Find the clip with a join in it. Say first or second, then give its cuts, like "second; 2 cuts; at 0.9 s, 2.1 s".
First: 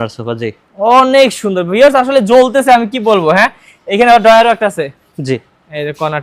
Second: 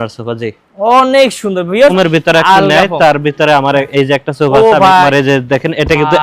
second; 2 cuts; at 1.9 s, 5.1 s